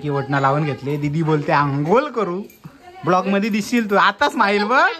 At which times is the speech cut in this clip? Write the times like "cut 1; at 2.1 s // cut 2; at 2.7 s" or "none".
none